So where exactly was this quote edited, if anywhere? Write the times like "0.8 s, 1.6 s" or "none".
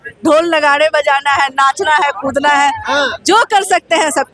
none